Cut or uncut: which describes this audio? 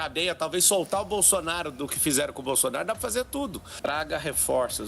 cut